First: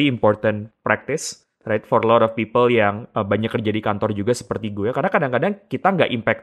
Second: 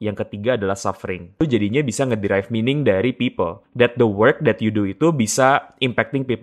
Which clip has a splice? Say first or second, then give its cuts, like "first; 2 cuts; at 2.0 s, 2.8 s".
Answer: second; 2 cuts; at 1.4 s, 3.6 s